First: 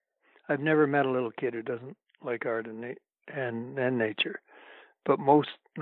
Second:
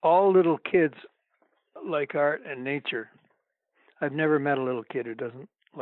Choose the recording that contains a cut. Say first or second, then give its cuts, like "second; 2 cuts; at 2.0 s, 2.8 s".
second; 1 cut; at 1.7 s